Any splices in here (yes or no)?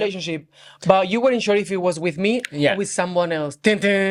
no